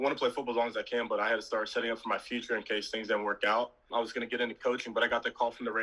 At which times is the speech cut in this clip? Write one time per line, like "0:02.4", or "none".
0:03.8